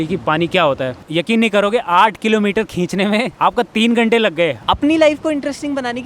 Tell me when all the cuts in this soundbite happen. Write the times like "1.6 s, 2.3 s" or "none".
1.0 s, 3.3 s, 4.6 s